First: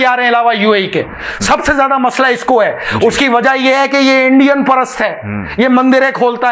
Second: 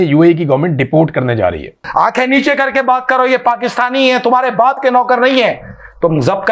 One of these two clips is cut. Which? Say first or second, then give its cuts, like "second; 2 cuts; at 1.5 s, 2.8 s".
second; 1 cut; at 1.8 s